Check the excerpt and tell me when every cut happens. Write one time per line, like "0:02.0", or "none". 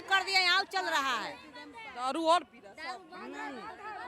none

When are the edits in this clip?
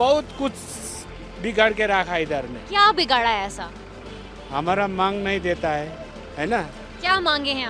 none

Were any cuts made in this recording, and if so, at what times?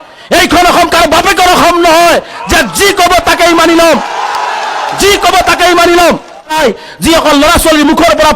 0:06.6

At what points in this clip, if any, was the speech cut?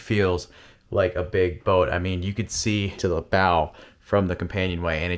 0:03.1

